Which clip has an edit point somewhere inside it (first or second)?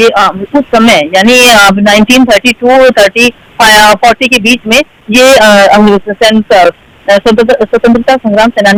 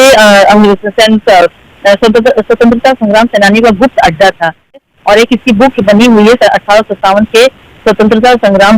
second